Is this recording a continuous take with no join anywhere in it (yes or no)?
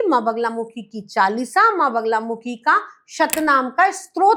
yes